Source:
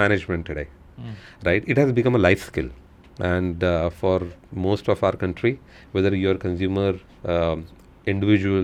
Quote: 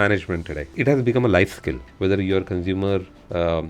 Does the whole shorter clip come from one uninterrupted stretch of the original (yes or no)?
no